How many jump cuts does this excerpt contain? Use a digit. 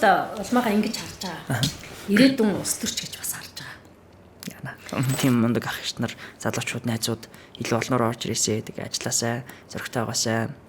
1